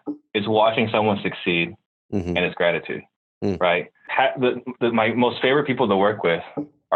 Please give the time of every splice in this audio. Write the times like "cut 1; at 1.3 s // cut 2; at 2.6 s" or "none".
cut 1; at 4.0 s